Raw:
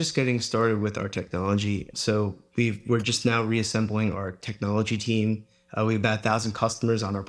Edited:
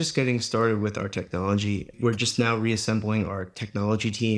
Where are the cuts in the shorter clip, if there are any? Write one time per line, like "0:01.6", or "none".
0:01.9